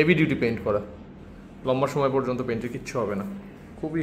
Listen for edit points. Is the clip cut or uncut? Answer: uncut